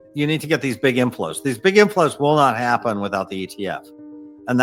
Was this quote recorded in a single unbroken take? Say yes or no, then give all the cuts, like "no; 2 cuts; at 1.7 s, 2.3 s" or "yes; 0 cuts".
yes; 0 cuts